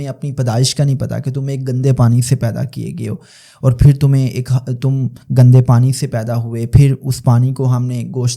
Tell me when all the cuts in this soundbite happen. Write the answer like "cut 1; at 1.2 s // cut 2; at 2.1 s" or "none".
none